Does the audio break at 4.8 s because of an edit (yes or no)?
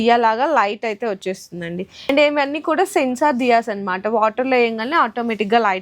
no